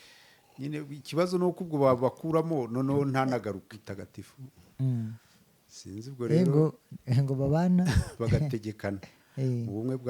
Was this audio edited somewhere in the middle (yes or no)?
yes